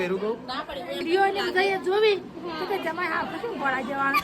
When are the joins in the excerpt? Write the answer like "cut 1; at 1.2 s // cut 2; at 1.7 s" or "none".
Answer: cut 1; at 1.0 s